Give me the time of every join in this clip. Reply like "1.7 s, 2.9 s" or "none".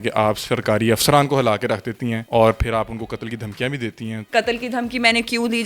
2.2 s, 4.2 s